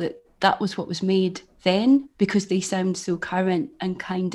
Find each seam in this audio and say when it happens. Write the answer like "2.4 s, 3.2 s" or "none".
none